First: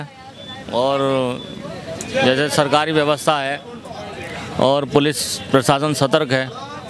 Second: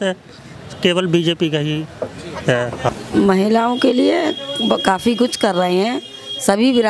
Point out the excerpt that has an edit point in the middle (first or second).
second